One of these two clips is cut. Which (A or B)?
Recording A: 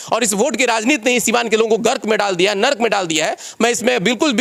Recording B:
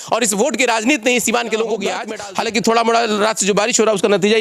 B